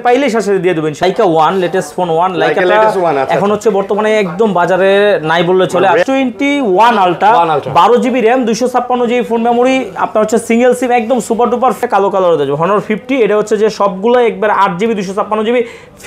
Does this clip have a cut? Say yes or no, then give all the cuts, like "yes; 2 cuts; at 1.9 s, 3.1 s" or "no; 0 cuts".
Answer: yes; 3 cuts; at 1.0 s, 6.0 s, 11.8 s